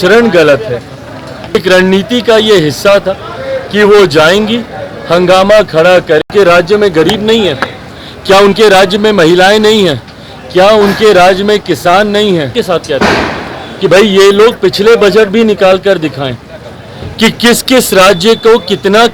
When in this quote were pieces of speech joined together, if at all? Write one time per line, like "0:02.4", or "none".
0:01.6
0:06.3
0:12.6